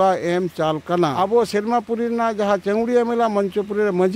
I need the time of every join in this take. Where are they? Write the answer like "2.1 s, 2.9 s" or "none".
1.1 s